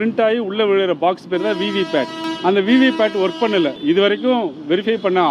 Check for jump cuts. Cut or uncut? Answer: cut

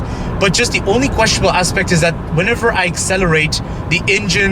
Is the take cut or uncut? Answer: uncut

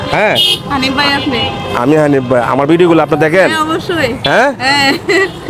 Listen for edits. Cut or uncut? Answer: uncut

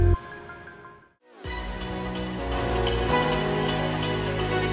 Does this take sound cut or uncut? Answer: cut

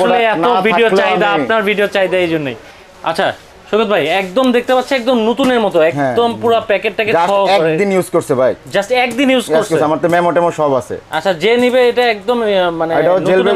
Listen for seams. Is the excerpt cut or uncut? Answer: cut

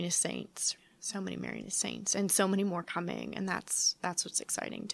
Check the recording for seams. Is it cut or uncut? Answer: uncut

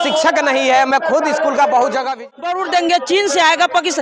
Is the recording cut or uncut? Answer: cut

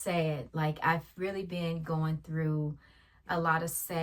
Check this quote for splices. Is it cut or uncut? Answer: uncut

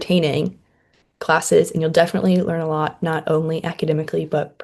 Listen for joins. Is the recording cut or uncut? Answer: uncut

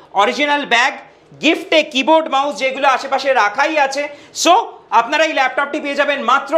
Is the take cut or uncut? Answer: uncut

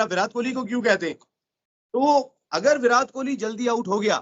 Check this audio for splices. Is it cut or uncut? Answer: uncut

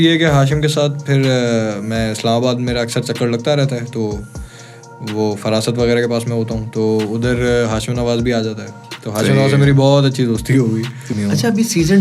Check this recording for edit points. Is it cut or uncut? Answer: cut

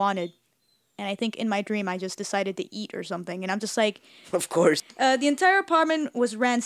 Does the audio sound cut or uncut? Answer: cut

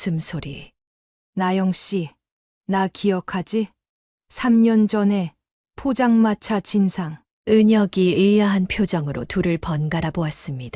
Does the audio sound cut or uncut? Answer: cut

